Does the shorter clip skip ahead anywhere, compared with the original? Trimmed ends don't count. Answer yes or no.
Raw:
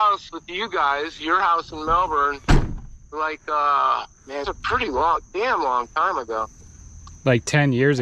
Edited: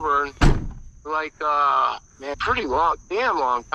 yes